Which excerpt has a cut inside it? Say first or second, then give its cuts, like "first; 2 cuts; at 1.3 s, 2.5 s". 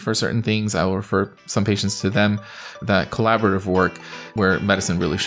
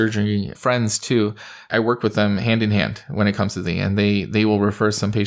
first; 2 cuts; at 2.8 s, 4.3 s